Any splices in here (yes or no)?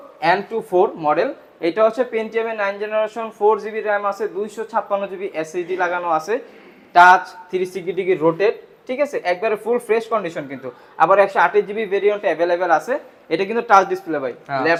no